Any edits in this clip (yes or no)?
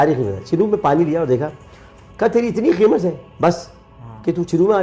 no